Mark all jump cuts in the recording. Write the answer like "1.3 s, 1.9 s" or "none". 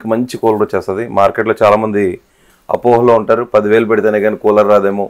none